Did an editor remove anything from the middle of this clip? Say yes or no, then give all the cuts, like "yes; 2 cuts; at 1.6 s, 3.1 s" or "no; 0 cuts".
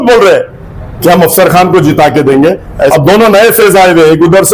yes; 1 cut; at 2.9 s